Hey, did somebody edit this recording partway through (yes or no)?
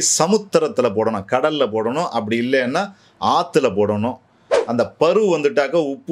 yes